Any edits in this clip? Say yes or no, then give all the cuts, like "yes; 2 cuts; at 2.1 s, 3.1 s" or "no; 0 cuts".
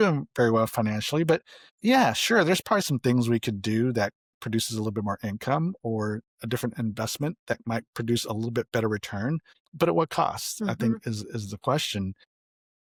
no; 0 cuts